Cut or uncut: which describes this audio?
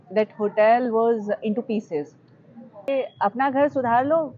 cut